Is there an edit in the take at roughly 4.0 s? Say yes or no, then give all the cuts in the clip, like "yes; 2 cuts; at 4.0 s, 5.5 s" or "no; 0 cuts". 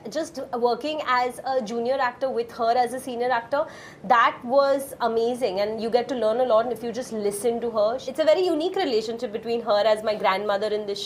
no; 1 cut; at 8.0 s